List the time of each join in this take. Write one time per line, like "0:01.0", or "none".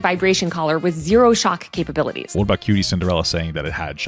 0:02.2

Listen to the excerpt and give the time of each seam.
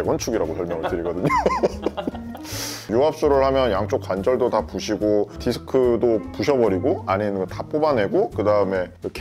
none

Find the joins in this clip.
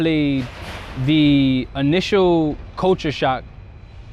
none

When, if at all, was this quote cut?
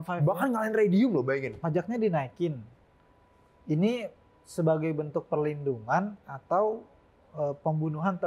0:01.5

